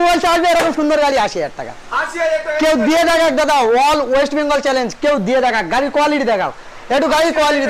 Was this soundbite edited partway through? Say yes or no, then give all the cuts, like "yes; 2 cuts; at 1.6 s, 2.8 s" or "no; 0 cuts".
no; 0 cuts